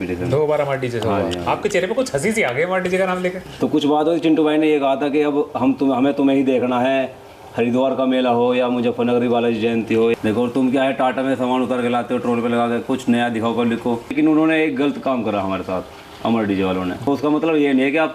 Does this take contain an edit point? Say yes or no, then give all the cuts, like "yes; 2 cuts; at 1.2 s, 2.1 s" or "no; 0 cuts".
yes; 4 cuts; at 3.5 s, 10.2 s, 14.1 s, 17.1 s